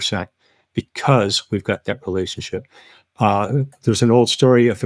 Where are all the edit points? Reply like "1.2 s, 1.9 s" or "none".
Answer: none